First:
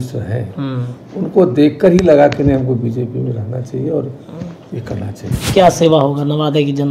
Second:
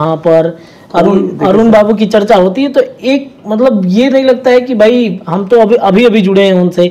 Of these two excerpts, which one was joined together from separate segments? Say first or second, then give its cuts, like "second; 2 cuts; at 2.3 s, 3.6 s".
first; 1 cut; at 5.4 s